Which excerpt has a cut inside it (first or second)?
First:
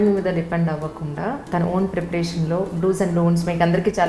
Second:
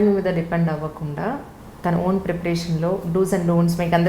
first